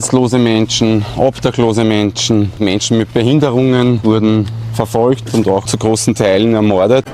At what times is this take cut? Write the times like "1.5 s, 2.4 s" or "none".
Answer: 2.6 s, 4.0 s, 5.7 s